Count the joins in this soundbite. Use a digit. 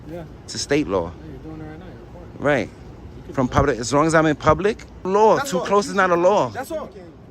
1